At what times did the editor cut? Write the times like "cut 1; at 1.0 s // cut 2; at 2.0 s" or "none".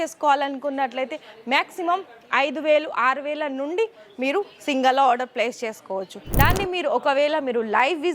cut 1; at 6.2 s